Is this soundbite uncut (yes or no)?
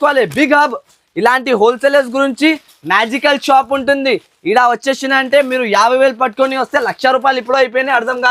yes